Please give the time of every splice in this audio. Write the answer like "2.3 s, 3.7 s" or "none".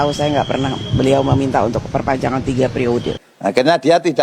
3.2 s